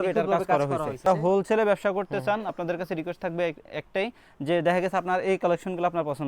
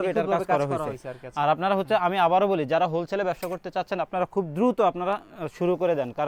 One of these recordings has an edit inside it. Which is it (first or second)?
first